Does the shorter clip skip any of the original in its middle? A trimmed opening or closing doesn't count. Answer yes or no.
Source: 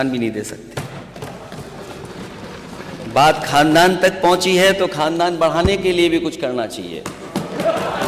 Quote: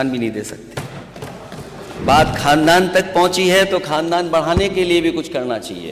yes